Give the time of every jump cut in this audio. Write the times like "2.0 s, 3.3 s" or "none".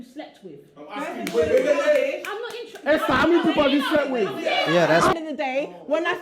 5.1 s